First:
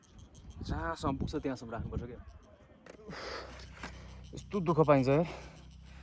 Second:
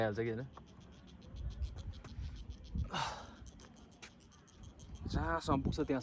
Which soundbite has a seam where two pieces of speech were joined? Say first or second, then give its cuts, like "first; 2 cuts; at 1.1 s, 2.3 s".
first; 1 cut; at 2.9 s